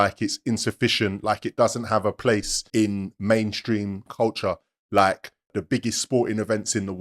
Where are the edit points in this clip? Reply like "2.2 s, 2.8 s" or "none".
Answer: 2.6 s, 4.1 s, 5.5 s